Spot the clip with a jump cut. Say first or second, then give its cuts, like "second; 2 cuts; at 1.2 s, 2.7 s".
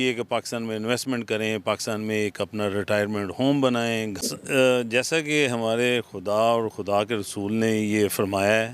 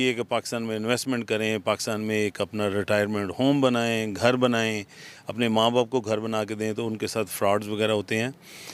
first; 1 cut; at 4.1 s